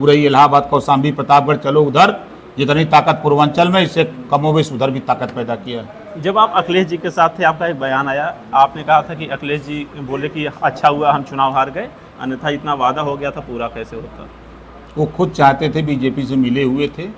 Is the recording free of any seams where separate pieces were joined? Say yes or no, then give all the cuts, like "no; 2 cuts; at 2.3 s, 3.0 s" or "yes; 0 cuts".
yes; 0 cuts